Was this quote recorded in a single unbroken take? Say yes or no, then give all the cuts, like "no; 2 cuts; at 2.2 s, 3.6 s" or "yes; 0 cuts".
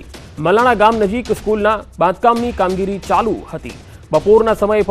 no; 1 cut; at 2.0 s